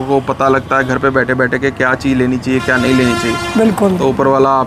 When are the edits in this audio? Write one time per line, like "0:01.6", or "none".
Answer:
none